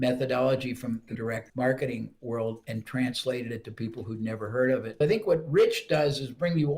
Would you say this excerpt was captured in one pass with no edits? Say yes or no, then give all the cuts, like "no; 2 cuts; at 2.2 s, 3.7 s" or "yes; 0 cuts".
no; 2 cuts; at 1.1 s, 4.9 s